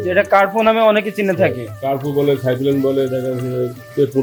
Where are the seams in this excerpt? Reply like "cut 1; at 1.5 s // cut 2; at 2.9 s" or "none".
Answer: none